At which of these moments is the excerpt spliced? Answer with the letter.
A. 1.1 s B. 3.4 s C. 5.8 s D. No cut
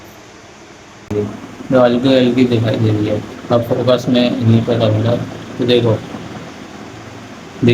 A